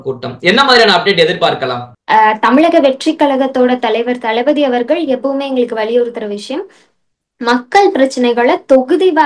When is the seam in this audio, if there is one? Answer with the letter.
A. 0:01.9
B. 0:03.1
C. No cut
C